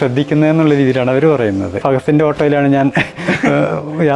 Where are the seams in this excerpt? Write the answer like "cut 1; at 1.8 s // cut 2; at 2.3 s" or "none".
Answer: cut 1; at 1.8 s